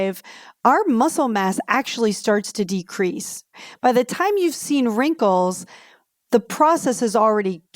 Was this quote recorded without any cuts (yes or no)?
no